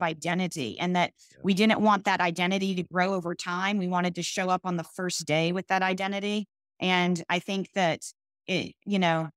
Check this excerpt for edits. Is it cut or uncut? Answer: uncut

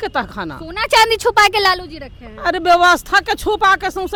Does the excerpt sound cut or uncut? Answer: uncut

